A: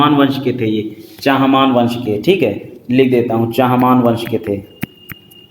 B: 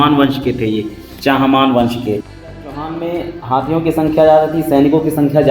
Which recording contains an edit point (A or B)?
B